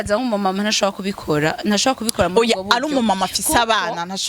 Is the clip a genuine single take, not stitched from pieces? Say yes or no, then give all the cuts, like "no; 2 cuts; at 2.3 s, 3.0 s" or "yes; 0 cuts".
yes; 0 cuts